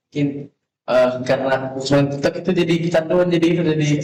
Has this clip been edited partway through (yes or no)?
no